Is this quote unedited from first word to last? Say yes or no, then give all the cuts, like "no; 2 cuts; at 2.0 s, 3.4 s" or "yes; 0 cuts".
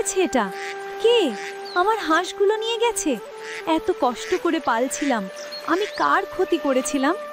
yes; 0 cuts